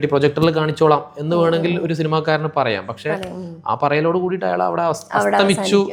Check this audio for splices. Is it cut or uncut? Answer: uncut